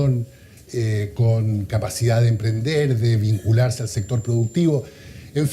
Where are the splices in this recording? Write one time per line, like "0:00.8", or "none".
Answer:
0:03.9